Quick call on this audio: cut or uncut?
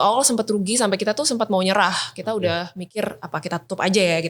uncut